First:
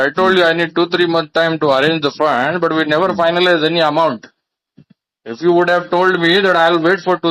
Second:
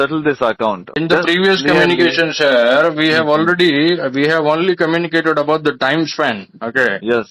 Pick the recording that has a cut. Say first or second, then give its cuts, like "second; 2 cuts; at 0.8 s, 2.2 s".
second; 1 cut; at 1.0 s